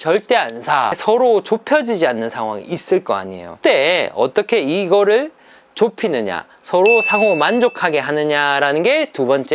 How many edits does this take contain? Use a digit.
2